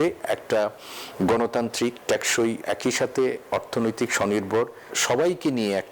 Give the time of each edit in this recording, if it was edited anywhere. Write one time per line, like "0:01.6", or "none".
0:05.0